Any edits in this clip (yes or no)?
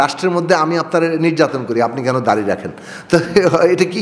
no